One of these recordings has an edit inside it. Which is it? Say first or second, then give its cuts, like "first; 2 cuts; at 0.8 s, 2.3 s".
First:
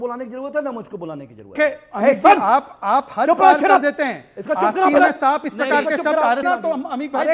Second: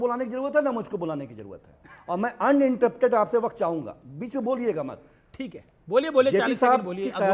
first; 2 cuts; at 1.6 s, 6.4 s